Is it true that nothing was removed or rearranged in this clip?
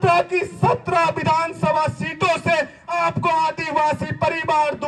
yes; 0 cuts

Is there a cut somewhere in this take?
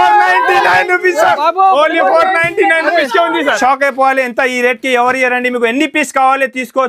yes; 1 cut; at 3.6 s

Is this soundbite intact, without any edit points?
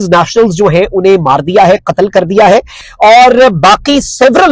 no; 1 cut; at 2.8 s

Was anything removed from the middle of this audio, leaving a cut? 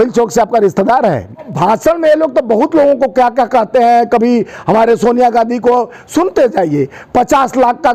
yes; 1 cut; at 1.5 s

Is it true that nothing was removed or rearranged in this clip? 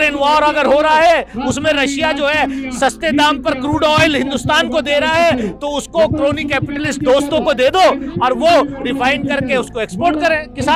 yes; 0 cuts

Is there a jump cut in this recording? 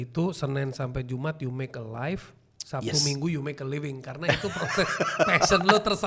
no; 0 cuts

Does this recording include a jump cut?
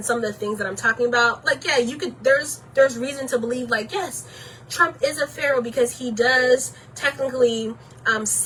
no; 0 cuts

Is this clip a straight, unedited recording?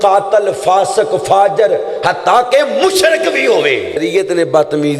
no; 1 cut; at 4.0 s

